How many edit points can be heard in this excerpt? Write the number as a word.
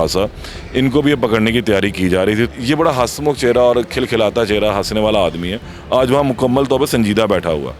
one